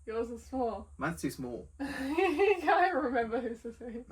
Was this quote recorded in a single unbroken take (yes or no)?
yes